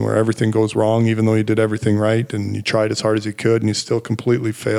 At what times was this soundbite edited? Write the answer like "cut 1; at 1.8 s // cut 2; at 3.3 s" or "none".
none